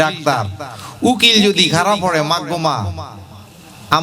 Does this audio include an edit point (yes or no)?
no